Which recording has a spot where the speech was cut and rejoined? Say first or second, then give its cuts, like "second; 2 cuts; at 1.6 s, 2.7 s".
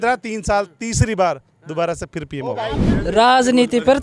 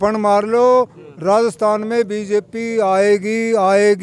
first; 1 cut; at 3.0 s